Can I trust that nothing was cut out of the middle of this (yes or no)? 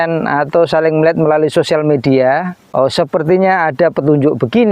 no